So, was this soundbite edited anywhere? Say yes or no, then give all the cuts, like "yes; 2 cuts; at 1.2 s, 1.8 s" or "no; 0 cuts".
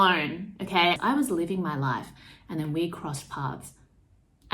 yes; 1 cut; at 1.0 s